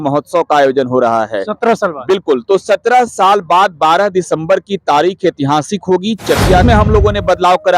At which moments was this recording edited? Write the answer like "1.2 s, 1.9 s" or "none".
6.6 s